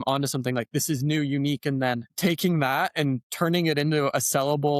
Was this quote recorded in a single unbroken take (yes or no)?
yes